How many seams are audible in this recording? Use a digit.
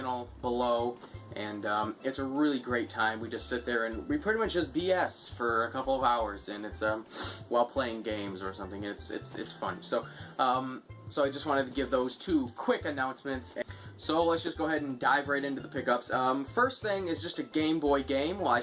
0